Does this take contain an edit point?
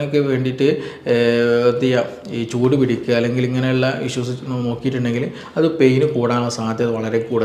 no; 0 cuts

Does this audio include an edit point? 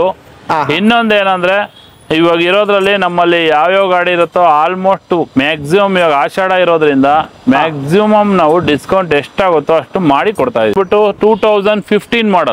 yes; 1 cut; at 10.7 s

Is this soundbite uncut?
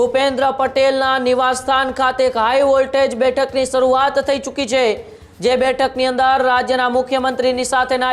yes; 0 cuts

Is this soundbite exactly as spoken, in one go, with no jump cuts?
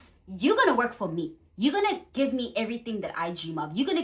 yes; 0 cuts

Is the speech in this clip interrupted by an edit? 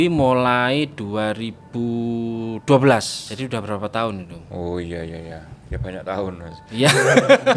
yes; 1 cut; at 3.2 s

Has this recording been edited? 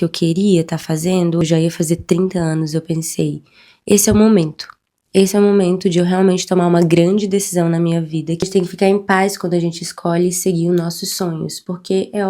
yes; 2 cuts; at 1.4 s, 8.5 s

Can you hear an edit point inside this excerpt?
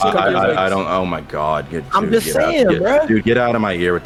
no; 0 cuts

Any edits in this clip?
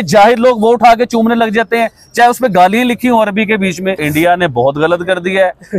yes; 1 cut; at 4.0 s

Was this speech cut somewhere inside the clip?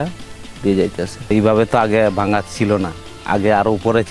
yes; 1 cut; at 1.3 s

